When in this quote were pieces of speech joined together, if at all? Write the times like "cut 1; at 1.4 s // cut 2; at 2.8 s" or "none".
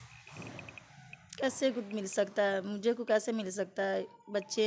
none